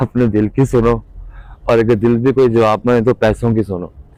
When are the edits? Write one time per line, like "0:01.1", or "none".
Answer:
none